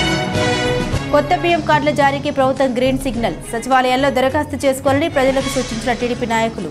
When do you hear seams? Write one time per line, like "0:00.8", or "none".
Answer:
0:00.9